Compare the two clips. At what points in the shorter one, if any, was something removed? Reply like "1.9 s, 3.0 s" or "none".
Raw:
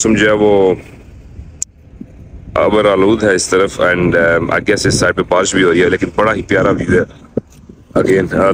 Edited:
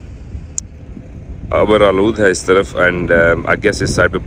none